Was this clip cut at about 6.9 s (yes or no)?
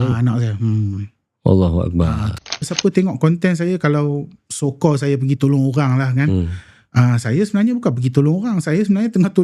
no